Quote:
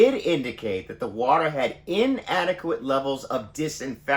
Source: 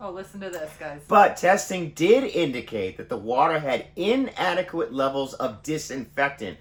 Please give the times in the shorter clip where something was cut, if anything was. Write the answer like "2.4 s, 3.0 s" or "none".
none